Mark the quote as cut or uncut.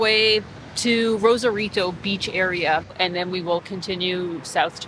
cut